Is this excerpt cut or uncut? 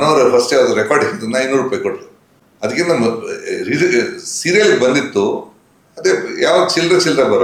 uncut